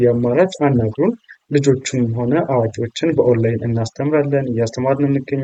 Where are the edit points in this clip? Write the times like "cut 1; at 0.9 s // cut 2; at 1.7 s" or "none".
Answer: none

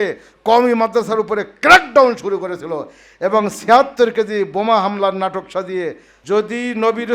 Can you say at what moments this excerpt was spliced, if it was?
cut 1; at 6.2 s

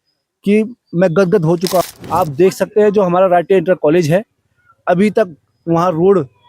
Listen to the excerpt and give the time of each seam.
cut 1; at 1.8 s

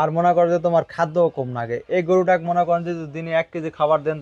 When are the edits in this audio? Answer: none

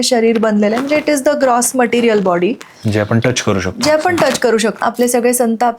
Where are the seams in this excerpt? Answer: cut 1; at 4.8 s

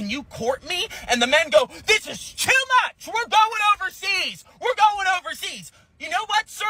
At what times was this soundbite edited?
cut 1; at 1.2 s

